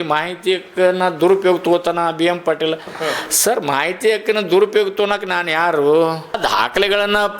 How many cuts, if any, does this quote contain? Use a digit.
1